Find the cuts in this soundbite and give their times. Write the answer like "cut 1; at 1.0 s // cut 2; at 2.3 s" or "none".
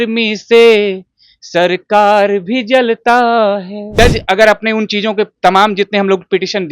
cut 1; at 3.8 s